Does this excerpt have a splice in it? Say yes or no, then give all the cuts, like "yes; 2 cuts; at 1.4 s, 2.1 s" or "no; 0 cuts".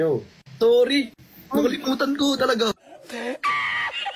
yes; 1 cut; at 2.7 s